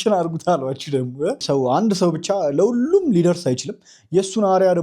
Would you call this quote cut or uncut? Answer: cut